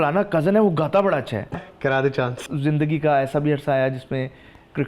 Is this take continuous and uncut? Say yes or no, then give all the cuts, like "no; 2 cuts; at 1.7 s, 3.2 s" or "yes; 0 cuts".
no; 2 cuts; at 1.6 s, 2.4 s